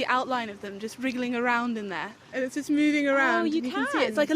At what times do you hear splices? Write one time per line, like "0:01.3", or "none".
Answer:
0:02.2